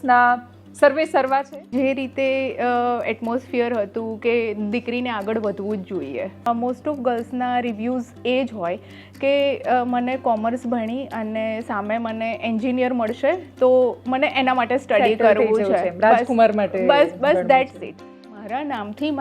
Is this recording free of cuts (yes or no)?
no